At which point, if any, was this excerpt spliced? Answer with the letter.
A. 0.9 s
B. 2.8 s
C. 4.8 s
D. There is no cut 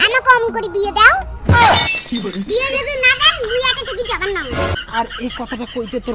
C